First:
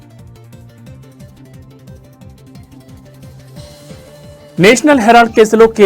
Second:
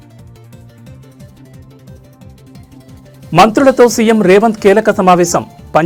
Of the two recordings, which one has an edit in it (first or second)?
first